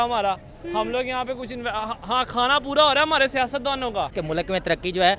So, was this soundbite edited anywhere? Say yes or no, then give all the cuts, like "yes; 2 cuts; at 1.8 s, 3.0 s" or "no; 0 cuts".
yes; 1 cut; at 4.2 s